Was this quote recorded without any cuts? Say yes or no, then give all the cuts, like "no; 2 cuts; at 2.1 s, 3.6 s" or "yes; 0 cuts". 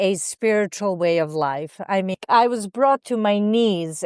no; 1 cut; at 2.2 s